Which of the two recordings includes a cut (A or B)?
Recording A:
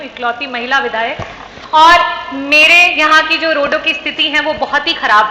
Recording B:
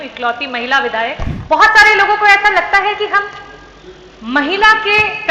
B